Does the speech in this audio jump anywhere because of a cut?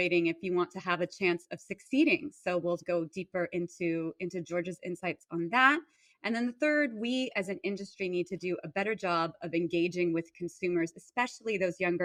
no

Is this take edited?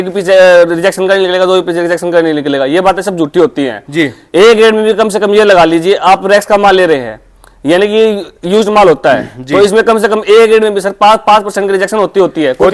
no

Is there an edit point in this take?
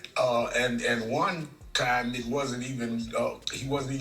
no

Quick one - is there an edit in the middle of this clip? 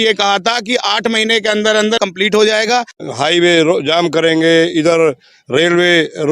yes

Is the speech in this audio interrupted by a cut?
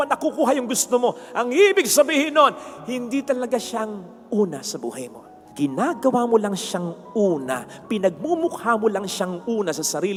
no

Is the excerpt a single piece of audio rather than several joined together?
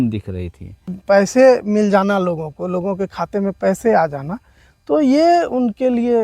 no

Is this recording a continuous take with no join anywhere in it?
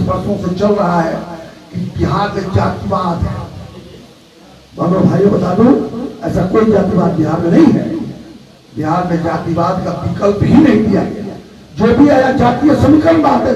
yes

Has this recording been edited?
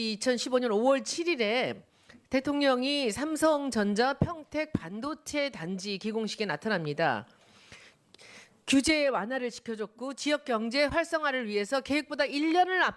yes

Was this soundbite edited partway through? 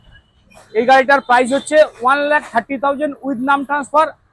no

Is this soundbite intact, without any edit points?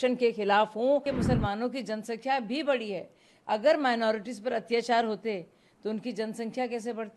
no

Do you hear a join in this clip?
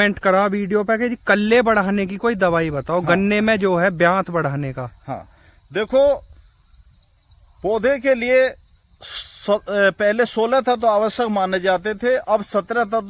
no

